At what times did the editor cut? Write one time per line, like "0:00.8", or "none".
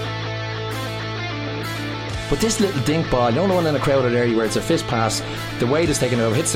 none